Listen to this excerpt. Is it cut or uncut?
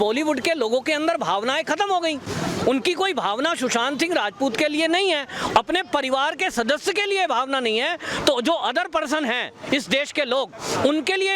uncut